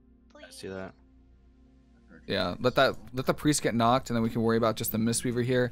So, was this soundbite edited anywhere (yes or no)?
no